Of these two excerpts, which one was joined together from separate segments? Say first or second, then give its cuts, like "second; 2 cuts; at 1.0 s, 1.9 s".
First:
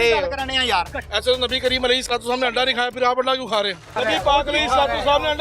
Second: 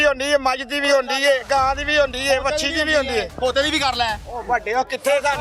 first; 2 cuts; at 1.1 s, 4.0 s